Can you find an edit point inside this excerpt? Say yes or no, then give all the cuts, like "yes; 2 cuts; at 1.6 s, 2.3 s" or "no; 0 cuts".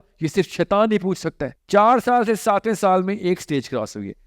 yes; 1 cut; at 1.5 s